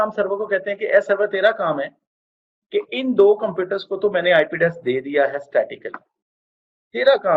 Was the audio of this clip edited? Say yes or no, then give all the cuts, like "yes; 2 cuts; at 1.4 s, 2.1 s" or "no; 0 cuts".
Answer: no; 0 cuts